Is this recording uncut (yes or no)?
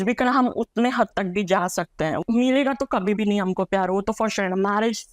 no